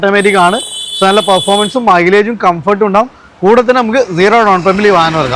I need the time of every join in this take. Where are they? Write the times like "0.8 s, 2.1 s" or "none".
none